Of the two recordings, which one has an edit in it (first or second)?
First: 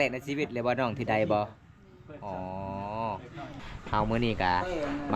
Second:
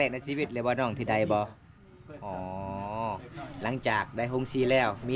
first